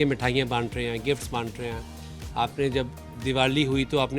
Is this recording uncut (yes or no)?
yes